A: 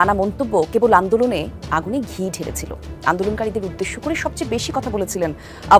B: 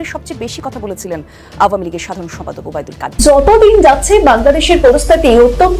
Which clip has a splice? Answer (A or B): B